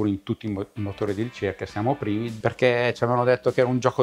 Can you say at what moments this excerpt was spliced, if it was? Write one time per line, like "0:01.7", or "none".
0:02.3